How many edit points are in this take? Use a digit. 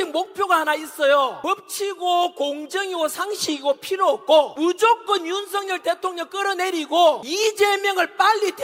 3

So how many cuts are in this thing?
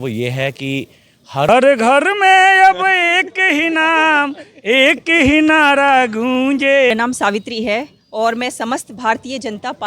2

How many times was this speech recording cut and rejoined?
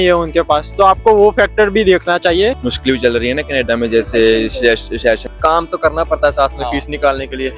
2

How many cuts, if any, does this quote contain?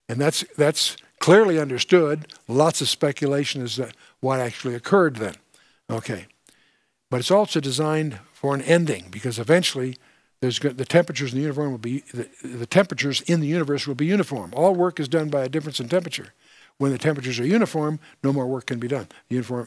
1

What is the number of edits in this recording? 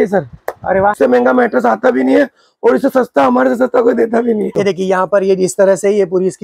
2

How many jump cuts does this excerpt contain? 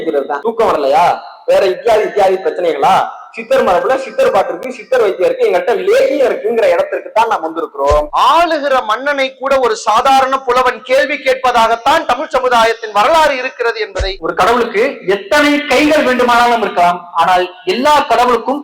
2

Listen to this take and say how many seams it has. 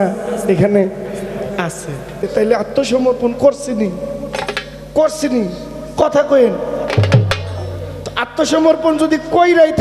1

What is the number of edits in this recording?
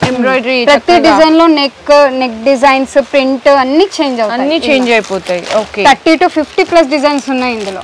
0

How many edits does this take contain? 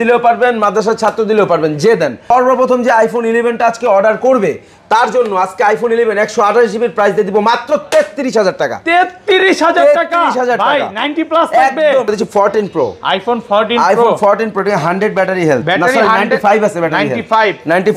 2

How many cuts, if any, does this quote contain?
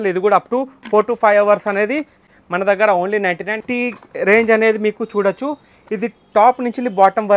2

